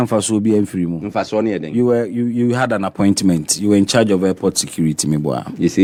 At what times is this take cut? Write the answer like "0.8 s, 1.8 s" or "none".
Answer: none